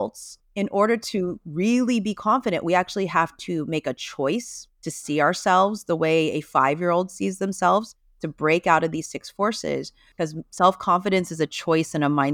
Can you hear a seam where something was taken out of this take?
yes; 1 cut; at 10.0 s

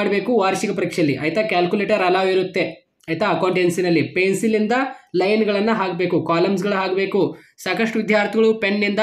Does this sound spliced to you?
no; 0 cuts

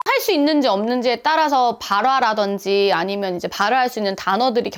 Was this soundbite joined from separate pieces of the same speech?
no; 0 cuts

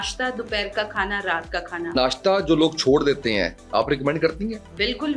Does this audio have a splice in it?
yes; 1 cut; at 1.9 s

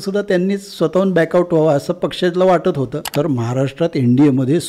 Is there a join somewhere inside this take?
yes; 1 cut; at 3.1 s

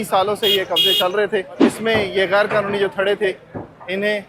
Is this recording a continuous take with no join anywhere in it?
no; 1 cut; at 1.6 s

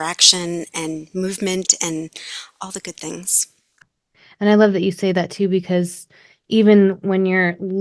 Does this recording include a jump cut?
yes; 2 cuts; at 3.8 s, 6.1 s

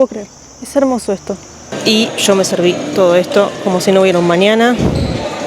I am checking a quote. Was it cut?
yes; 1 cut; at 1.7 s

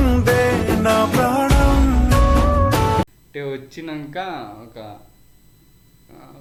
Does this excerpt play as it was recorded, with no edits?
yes; 0 cuts

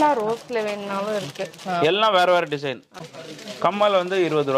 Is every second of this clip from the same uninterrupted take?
no; 1 cut; at 2.9 s

